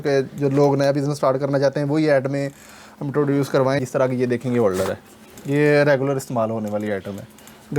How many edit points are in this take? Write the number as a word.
one